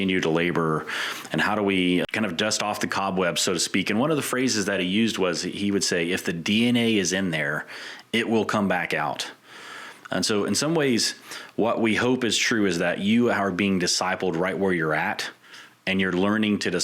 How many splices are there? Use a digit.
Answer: 1